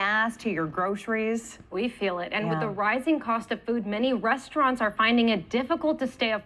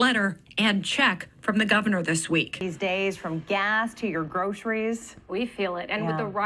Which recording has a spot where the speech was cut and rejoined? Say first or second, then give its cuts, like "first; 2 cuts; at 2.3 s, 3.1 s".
second; 1 cut; at 2.7 s